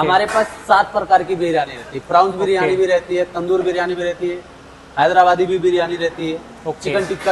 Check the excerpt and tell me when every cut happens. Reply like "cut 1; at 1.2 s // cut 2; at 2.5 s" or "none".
none